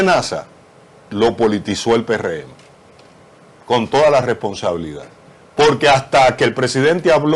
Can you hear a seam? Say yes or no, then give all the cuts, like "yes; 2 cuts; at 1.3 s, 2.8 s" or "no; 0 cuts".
no; 0 cuts